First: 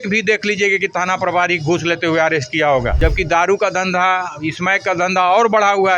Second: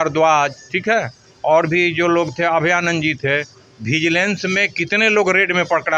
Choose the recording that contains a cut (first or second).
first